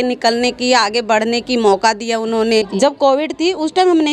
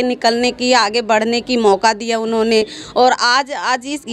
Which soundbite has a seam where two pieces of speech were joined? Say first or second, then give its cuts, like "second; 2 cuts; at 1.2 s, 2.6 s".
first; 1 cut; at 2.7 s